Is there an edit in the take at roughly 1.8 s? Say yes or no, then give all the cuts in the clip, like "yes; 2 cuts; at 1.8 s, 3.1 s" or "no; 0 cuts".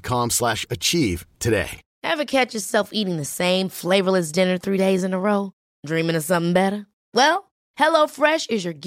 yes; 1 cut; at 1.8 s